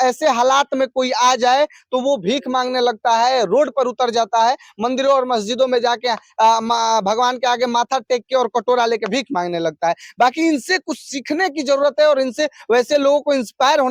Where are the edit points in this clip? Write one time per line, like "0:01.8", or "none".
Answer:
none